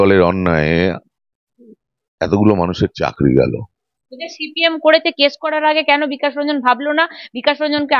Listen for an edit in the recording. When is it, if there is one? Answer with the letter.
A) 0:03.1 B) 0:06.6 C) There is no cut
C